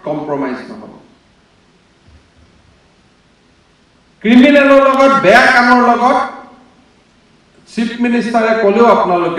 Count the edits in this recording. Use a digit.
0